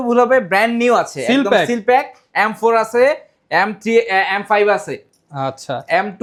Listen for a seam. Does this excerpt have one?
no; 0 cuts

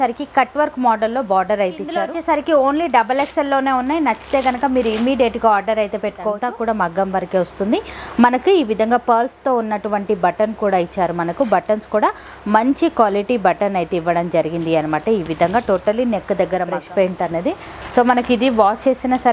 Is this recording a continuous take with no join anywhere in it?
no; 3 cuts; at 2.1 s, 6.4 s, 16.8 s

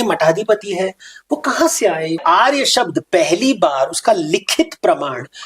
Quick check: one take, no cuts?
no; 1 cut; at 2.2 s

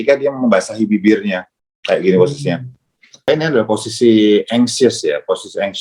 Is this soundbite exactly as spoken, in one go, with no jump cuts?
no; 1 cut; at 3.3 s

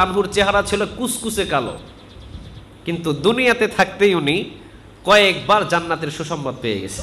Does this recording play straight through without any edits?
yes; 0 cuts

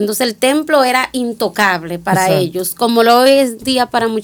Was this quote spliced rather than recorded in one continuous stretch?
no; 0 cuts

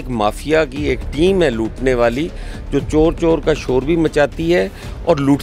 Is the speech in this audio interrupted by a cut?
no; 0 cuts

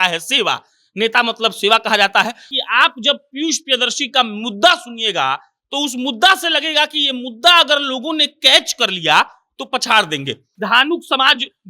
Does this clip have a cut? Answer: yes; 2 cuts; at 2.5 s, 10.4 s

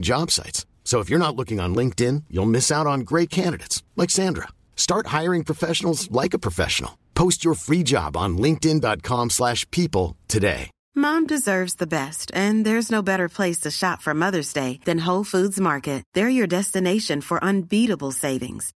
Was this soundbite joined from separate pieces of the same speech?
yes; 1 cut; at 10.7 s

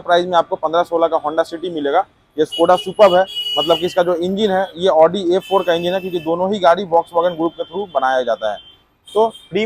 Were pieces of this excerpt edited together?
no; 0 cuts

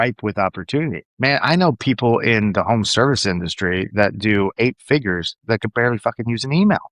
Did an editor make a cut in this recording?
yes; 1 cut; at 1.0 s

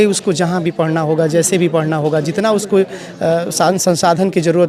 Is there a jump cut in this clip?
no; 0 cuts

